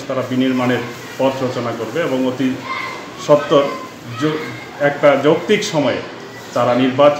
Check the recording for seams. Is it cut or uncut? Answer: uncut